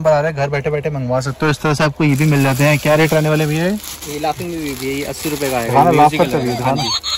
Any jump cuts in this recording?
no; 0 cuts

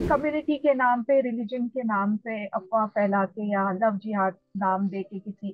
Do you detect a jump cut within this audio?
no; 0 cuts

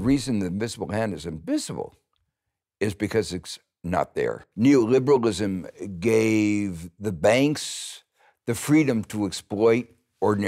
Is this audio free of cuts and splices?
no; 1 cut; at 4.4 s

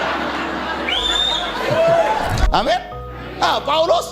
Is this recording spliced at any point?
yes; 1 cut; at 2.4 s

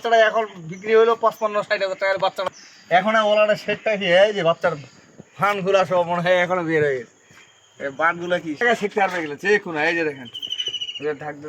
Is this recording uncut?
no; 2 cuts; at 2.5 s, 8.6 s

